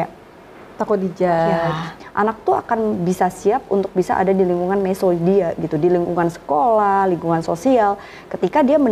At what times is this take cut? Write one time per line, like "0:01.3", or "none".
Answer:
0:02.0